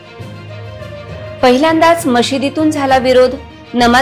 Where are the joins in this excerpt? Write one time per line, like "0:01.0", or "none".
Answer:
0:01.0